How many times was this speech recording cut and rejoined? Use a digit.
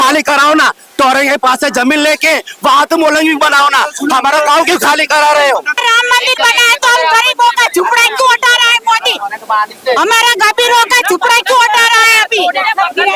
1